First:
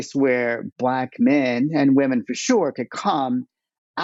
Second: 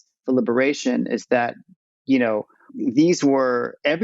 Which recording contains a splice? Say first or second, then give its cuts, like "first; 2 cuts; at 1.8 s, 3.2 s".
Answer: second; 1 cut; at 2.7 s